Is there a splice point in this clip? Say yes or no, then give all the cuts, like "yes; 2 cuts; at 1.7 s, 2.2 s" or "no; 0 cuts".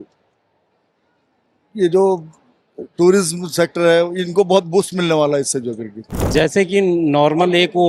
yes; 1 cut; at 6.2 s